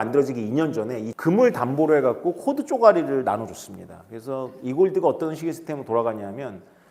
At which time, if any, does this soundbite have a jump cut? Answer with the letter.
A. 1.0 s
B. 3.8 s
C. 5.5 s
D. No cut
A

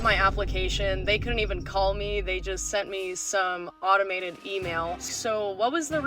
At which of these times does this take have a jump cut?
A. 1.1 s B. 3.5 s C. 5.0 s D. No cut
C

